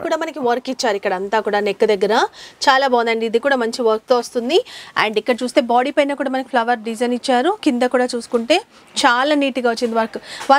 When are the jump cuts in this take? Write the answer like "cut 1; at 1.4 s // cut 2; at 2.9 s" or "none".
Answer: none